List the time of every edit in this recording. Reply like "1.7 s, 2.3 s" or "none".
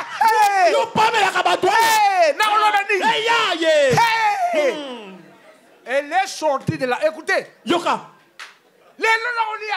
none